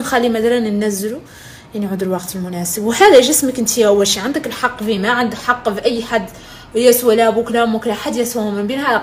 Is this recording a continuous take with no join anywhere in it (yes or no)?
yes